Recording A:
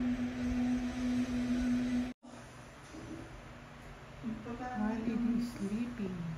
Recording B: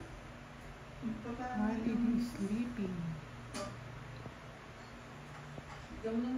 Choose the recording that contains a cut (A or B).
A